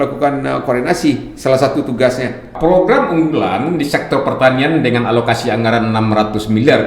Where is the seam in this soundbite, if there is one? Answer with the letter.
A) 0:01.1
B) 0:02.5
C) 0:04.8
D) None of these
B